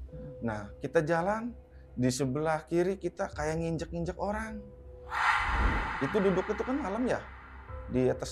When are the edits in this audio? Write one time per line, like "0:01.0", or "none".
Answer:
0:05.9

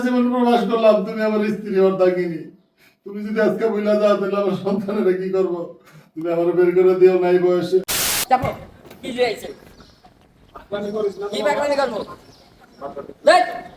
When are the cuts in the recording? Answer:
0:08.1

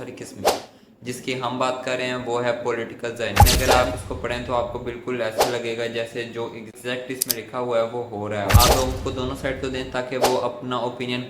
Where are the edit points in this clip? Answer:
0:03.5
0:08.5

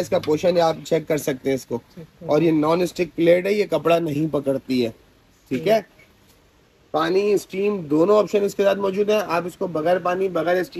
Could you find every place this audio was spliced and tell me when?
none

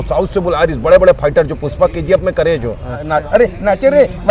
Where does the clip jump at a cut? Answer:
0:03.1

